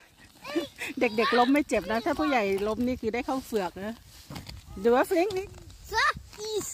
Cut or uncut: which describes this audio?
uncut